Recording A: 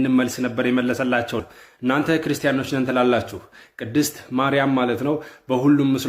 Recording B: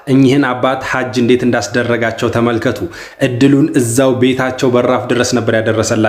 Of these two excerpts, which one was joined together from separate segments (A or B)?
A